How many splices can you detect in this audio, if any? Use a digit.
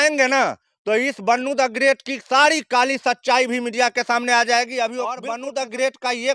1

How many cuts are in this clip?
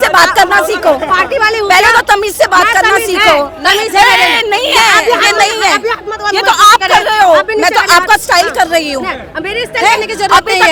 0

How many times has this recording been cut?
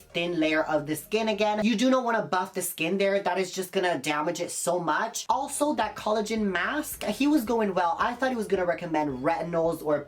0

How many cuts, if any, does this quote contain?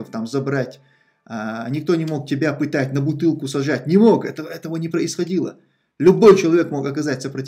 0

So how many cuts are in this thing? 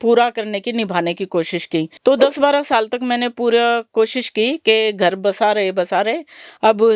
1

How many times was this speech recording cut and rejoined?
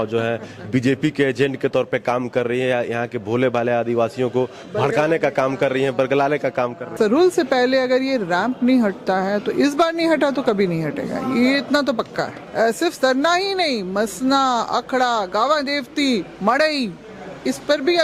2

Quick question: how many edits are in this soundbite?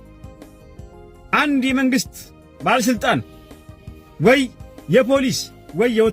1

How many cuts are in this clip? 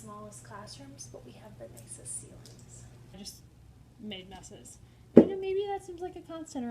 1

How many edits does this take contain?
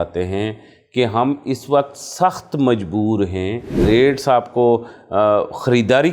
1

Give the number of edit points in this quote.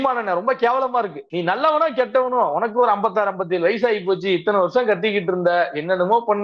1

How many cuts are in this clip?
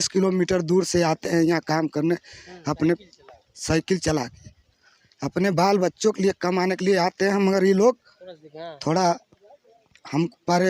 0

